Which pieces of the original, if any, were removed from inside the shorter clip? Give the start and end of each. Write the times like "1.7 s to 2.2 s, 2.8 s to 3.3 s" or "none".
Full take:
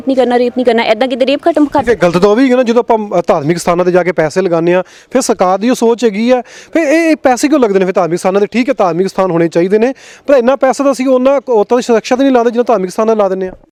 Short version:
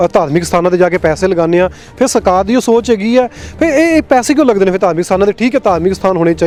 none

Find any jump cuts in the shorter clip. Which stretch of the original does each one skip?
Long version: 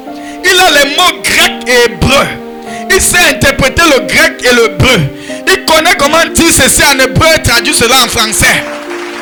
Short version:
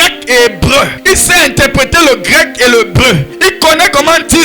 2.4 s to 2.8 s, 5.1 s to 5.4 s

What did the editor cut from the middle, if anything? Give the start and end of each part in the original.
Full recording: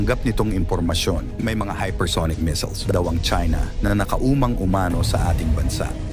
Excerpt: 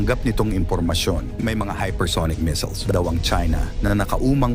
none

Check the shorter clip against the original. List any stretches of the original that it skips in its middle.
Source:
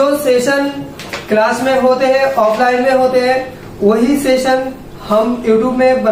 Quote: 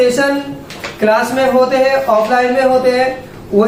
none

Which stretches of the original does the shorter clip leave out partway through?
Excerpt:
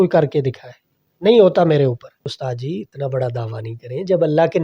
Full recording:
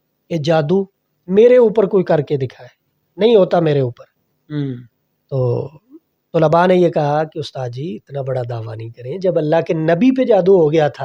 4.3 s to 7.5 s

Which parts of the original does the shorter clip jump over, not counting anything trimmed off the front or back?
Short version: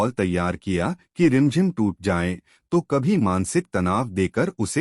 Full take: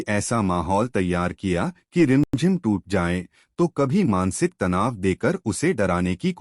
2.3 s to 2.4 s

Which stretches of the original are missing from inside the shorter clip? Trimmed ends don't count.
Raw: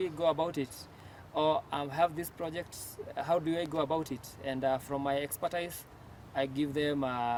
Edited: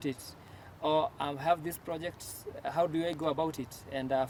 none

